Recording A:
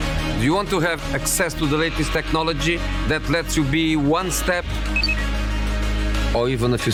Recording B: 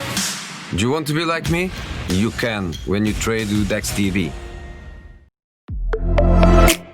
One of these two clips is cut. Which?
B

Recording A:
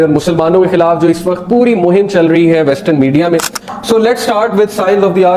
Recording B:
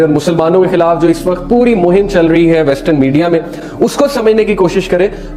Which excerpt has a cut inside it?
A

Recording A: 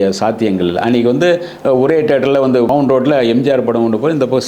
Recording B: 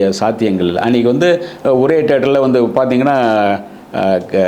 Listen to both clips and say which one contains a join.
A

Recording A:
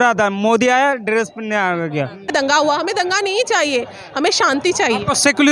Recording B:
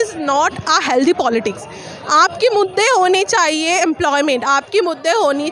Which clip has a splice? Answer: A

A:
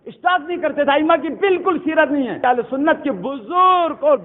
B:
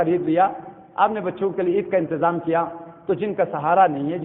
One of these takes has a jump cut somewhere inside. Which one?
A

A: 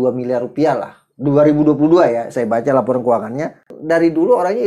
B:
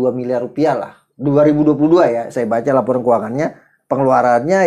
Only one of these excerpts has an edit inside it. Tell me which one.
A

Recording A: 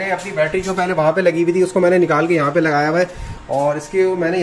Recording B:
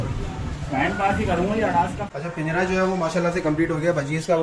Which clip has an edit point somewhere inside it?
B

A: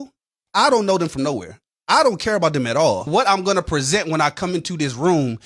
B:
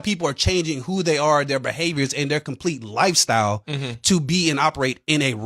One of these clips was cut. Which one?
A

